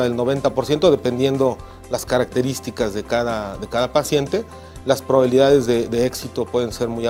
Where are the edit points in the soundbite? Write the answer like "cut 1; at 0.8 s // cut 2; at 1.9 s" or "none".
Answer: none